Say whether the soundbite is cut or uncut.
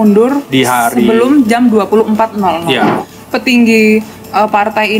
cut